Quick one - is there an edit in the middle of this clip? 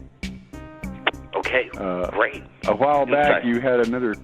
yes; 1 cut; at 2.4 s

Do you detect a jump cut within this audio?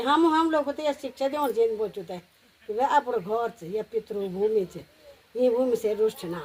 no; 0 cuts

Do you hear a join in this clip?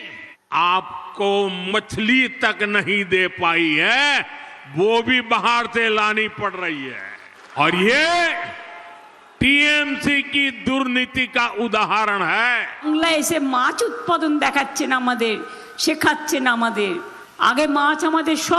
yes; 1 cut; at 12.8 s

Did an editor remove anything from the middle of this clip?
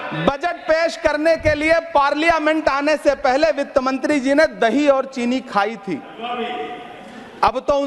no; 0 cuts

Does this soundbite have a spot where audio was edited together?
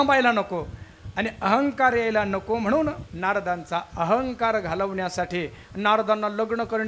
yes; 1 cut; at 3.1 s

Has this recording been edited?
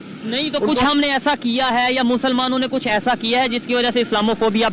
no; 0 cuts

